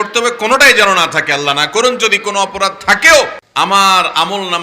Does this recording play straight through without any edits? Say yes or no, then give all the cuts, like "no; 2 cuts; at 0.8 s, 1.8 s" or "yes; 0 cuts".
no; 1 cut; at 3.4 s